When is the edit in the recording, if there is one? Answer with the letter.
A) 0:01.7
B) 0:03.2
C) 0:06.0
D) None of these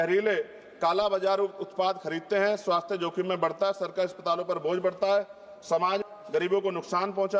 C